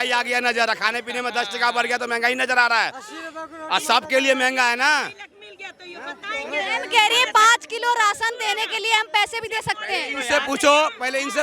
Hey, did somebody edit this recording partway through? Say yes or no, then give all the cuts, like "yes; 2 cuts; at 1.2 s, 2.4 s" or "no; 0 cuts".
no; 0 cuts